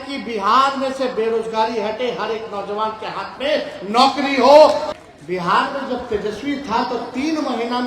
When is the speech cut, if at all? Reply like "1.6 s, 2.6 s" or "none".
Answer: 4.8 s